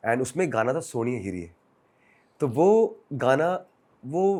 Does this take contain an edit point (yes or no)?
no